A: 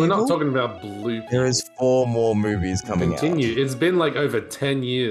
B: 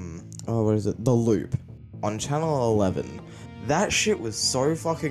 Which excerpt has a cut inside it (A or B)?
A